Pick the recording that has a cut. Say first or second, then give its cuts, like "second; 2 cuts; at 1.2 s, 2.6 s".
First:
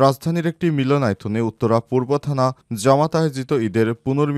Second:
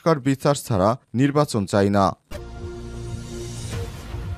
second; 1 cut; at 2.2 s